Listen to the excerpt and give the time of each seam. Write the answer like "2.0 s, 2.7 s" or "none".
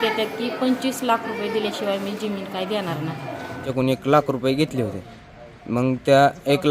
3.7 s